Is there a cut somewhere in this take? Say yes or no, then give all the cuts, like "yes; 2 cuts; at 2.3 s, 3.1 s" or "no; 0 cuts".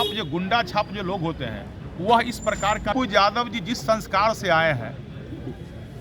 yes; 1 cut; at 2.9 s